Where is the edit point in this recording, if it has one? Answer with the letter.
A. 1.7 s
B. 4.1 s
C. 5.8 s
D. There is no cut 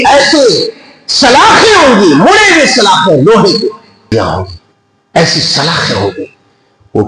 B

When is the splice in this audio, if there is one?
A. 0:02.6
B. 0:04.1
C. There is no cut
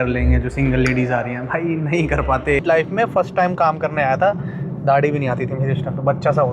A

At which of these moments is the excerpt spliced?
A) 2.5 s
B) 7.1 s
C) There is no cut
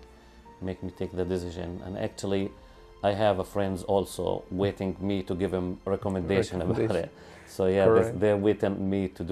C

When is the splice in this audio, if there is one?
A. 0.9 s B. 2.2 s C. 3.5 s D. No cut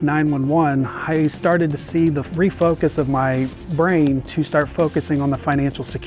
B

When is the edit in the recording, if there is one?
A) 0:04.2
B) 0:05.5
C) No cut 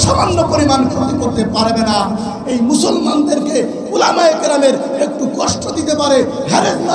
C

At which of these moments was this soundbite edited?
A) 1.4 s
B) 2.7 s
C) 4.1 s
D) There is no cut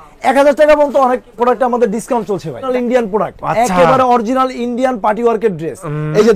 B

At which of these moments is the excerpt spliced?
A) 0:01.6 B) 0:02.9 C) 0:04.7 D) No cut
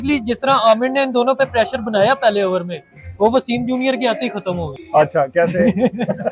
C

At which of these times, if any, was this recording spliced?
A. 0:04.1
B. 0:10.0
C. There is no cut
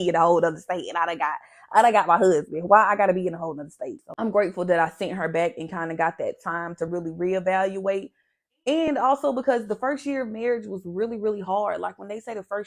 A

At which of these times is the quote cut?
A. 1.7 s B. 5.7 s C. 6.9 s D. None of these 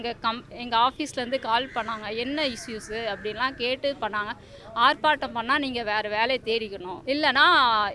C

